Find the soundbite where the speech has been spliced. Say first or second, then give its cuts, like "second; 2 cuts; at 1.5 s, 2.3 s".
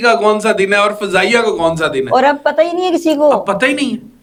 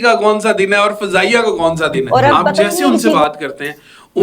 second; 1 cut; at 2.7 s